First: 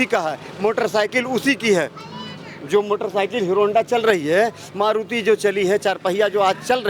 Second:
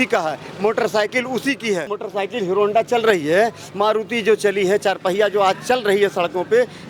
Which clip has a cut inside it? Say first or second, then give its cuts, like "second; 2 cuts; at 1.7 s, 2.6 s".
second; 1 cut; at 2.0 s